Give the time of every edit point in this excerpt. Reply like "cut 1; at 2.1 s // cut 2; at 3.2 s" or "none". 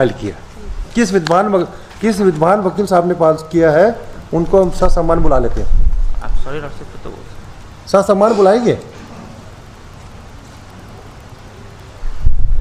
none